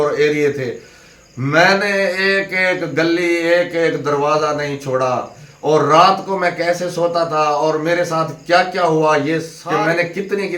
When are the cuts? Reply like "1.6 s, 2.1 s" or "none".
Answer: 9.5 s